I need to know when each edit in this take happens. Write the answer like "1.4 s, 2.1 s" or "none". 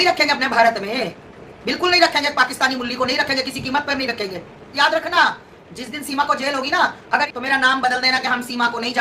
4.7 s, 7.3 s